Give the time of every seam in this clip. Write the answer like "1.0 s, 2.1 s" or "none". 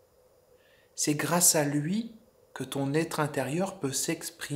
none